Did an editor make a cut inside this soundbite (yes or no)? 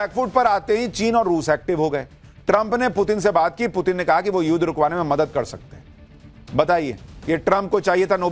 no